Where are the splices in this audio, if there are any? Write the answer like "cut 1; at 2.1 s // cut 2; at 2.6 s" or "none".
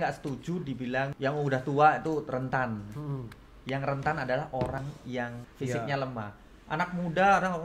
cut 1; at 1.1 s // cut 2; at 5.1 s

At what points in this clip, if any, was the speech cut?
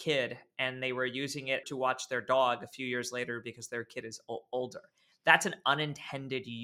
none

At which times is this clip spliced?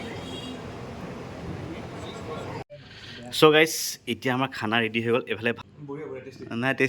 cut 1; at 2.6 s // cut 2; at 5.6 s

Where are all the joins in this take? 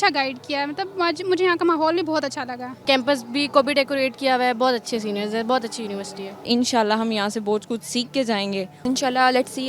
cut 1; at 2.8 s // cut 2; at 6.4 s // cut 3; at 8.9 s

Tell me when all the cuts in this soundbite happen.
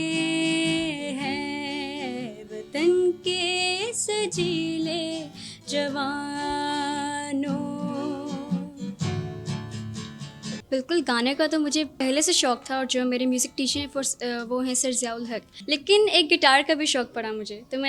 cut 1; at 10.6 s // cut 2; at 11.9 s // cut 3; at 15.5 s

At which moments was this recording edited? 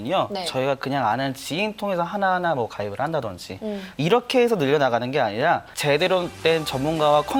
none

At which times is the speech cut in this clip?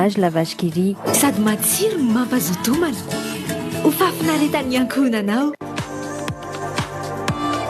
none

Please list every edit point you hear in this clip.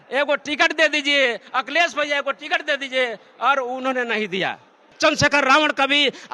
cut 1; at 4.9 s

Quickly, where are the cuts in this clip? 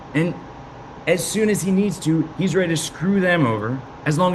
none

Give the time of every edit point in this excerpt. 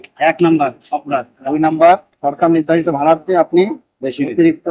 none

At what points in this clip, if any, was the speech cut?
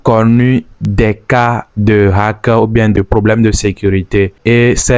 none

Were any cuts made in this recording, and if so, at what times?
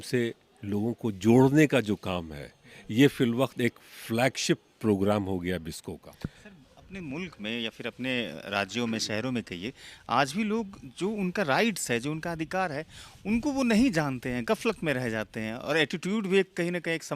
none

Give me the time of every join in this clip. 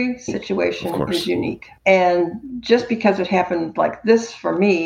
cut 1; at 1.7 s

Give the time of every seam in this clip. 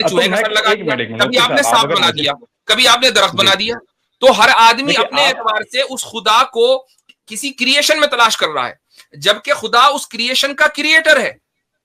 none

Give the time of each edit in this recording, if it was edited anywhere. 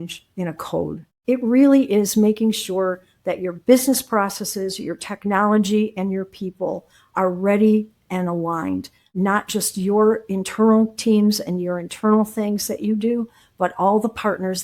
cut 1; at 1.1 s

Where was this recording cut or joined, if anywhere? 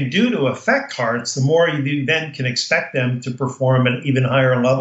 none

